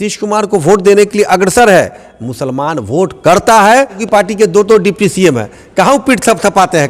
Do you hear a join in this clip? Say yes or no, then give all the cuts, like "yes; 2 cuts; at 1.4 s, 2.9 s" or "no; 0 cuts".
yes; 1 cut; at 4.0 s